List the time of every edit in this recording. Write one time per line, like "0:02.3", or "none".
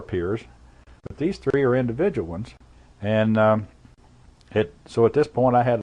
none